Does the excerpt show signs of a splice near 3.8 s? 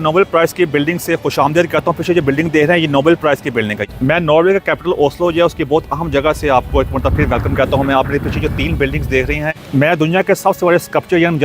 yes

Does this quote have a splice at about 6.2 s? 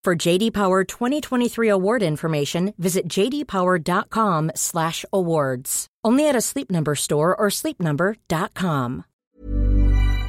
no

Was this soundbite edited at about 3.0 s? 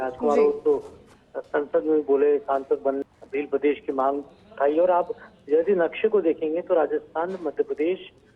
yes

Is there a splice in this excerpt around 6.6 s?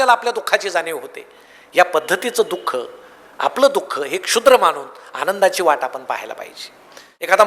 yes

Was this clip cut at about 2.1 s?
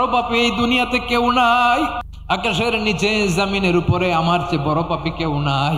yes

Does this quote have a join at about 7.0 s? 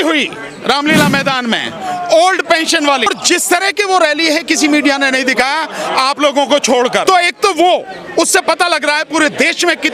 yes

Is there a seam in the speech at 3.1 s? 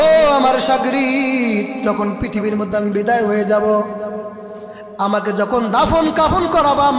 no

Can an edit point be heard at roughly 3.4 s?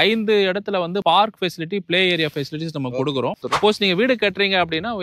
yes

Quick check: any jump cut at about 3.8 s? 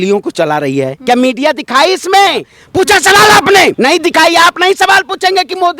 yes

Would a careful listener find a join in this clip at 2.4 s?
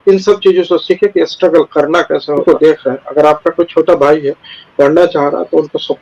yes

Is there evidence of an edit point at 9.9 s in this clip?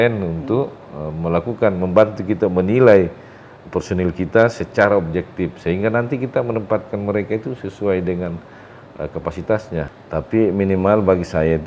yes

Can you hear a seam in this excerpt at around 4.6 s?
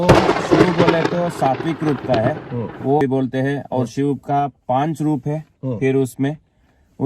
no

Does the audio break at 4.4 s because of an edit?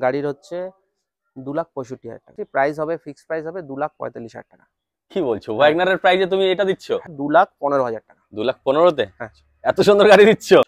no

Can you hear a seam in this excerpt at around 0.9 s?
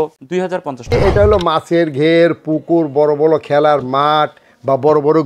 yes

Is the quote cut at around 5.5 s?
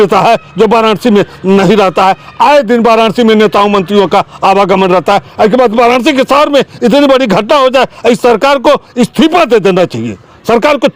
no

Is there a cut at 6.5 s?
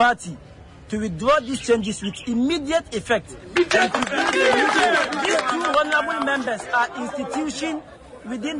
no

